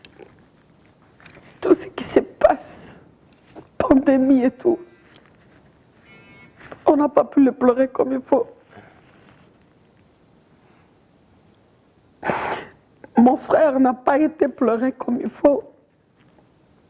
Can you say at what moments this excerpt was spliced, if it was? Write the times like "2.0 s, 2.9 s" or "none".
0.9 s